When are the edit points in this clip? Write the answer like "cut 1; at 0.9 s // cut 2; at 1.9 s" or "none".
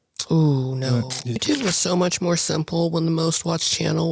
cut 1; at 1.4 s